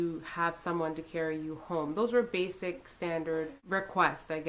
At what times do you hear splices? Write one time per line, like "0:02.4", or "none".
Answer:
0:03.6